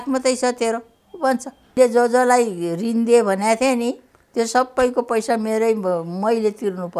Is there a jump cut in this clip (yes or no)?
yes